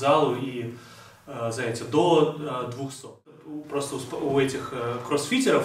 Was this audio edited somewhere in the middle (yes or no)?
yes